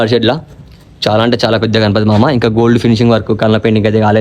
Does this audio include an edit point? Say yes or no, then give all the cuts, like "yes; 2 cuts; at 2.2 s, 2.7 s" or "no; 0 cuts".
no; 0 cuts